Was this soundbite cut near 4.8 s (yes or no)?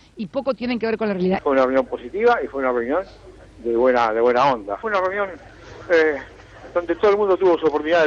yes